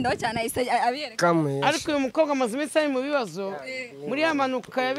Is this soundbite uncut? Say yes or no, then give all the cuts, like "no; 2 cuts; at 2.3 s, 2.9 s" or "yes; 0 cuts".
yes; 0 cuts